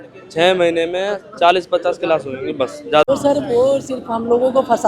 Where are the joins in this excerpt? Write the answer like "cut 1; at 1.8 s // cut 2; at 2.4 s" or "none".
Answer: cut 1; at 3.1 s